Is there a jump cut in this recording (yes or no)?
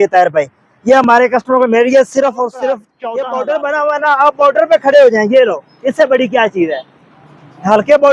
yes